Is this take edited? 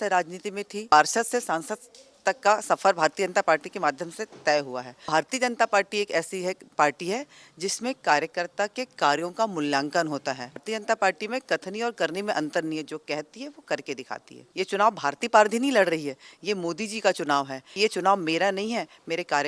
yes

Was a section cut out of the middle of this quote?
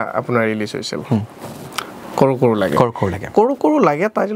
no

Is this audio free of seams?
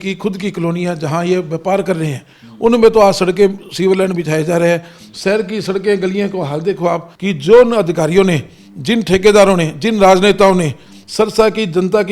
no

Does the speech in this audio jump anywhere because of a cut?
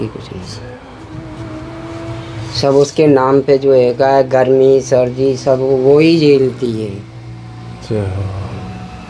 no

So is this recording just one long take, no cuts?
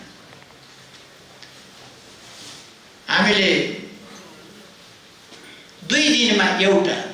yes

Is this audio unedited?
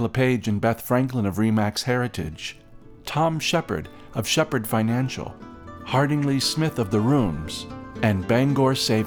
yes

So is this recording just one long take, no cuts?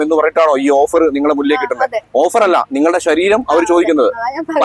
yes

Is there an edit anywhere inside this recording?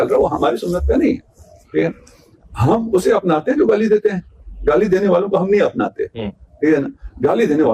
no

